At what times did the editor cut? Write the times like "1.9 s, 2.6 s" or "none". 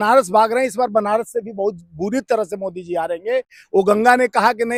none